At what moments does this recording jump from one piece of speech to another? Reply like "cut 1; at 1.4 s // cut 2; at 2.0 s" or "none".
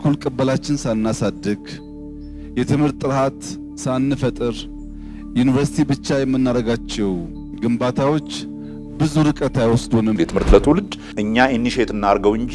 cut 1; at 10.2 s